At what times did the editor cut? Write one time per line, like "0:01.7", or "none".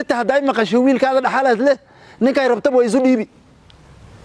none